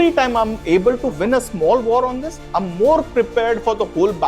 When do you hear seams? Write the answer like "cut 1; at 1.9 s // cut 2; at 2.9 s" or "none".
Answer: cut 1; at 1.1 s